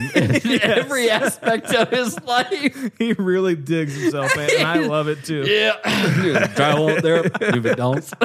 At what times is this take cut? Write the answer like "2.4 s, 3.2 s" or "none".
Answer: none